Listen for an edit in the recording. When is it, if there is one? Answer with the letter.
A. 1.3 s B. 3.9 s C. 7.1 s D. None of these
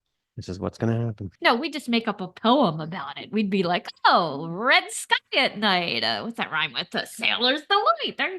A